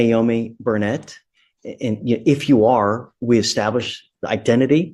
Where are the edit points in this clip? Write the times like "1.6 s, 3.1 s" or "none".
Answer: none

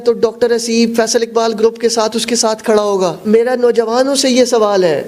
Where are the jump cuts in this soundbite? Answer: 3.2 s

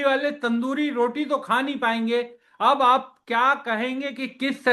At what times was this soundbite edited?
none

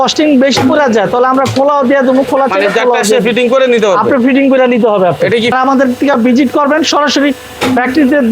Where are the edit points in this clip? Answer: 5.5 s

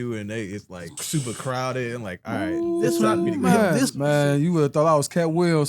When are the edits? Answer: 0.9 s, 3.9 s

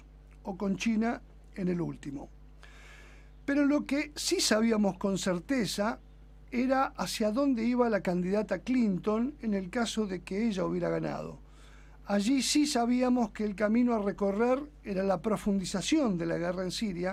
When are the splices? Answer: none

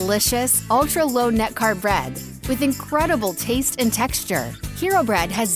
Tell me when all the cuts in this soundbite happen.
none

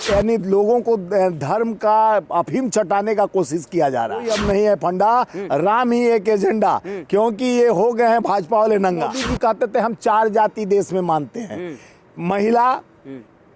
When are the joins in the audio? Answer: 4.3 s, 9.2 s

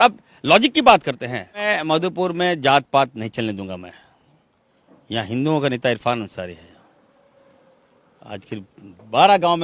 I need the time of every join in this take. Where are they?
1.6 s

